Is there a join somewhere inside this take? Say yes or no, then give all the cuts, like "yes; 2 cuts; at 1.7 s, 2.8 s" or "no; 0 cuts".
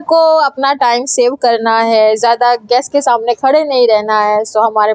no; 0 cuts